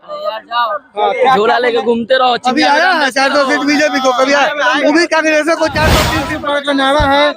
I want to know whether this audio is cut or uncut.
cut